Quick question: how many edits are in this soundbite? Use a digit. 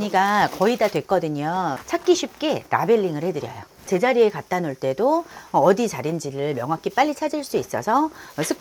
0